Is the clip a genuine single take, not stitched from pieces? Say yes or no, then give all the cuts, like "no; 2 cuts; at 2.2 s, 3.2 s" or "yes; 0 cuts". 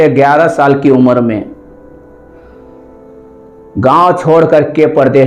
yes; 0 cuts